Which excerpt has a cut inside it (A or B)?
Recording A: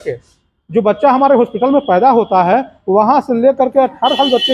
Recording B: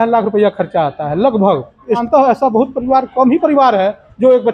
B